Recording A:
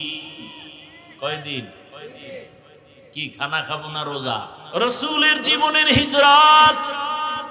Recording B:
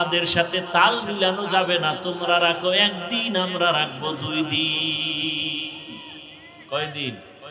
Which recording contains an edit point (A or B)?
A